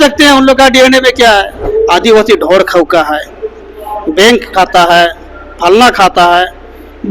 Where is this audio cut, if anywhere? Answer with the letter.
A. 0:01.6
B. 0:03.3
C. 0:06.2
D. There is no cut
A